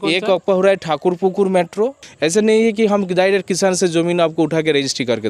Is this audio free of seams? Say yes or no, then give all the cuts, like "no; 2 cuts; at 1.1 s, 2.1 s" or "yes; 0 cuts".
no; 1 cut; at 2.0 s